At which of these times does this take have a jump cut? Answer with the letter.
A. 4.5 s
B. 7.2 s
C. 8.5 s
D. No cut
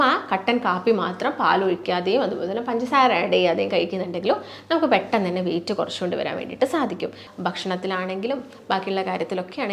B